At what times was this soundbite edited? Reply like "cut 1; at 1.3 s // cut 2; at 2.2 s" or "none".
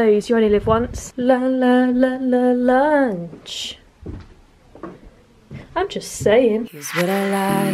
none